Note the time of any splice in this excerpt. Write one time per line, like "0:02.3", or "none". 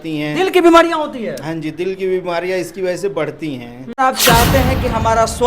0:04.0